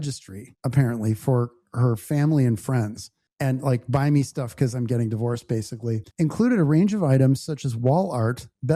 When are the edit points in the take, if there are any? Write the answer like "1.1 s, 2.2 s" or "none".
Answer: 6.0 s